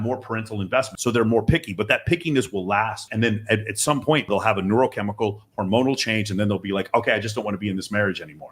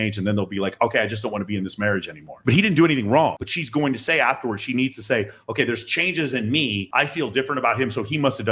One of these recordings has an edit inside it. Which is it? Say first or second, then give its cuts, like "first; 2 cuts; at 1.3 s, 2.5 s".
first; 3 cuts; at 0.9 s, 3.1 s, 4.3 s